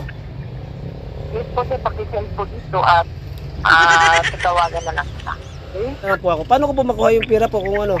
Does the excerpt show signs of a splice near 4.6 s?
no; 1 cut; at 6.2 s

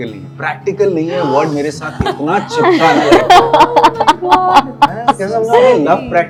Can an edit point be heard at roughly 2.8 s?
no; 0 cuts

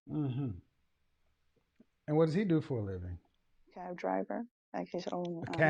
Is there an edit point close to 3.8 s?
yes; 1 cut; at 3.8 s

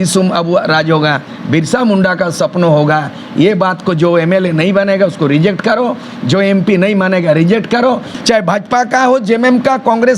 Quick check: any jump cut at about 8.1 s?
yes; 1 cut; at 8.1 s

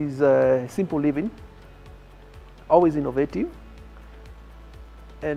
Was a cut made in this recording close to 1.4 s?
no; 0 cuts

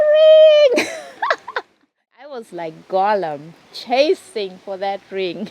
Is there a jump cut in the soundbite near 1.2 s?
no; 1 cut; at 2.4 s

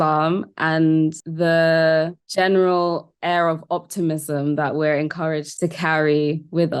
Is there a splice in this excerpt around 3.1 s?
no; 2 cuts; at 1.2 s, 5.5 s

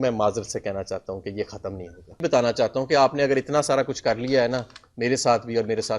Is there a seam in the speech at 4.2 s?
no; 1 cut; at 2.2 s

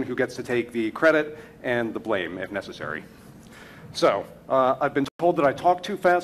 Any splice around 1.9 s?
yes; 1 cut; at 1.9 s

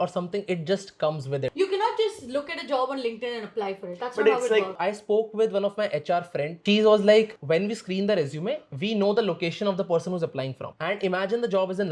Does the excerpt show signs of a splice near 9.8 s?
no; 2 cuts; at 1.5 s, 4.8 s

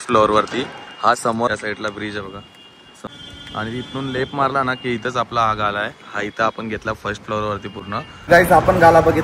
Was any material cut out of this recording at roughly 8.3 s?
yes; 3 cuts; at 1.5 s, 3.0 s, 8.3 s

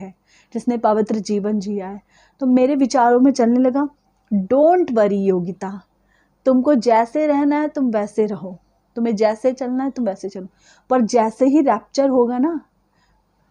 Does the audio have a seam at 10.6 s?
no; 0 cuts

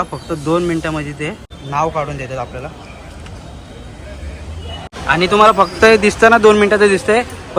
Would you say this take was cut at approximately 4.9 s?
yes; 2 cuts; at 1.5 s, 4.9 s

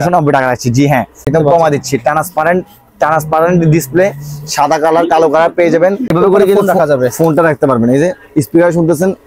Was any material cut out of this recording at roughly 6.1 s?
yes; 2 cuts; at 1.3 s, 6.1 s

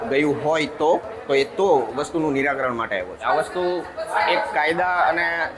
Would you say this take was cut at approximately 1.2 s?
no; 1 cut; at 3.2 s

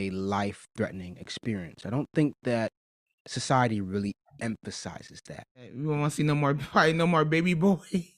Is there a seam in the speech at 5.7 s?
yes; 1 cut; at 5.7 s

